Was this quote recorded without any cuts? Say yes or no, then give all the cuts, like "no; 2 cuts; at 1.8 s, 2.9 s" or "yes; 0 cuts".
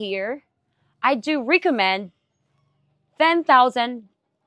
yes; 0 cuts